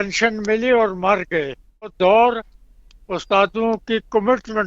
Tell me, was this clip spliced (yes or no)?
yes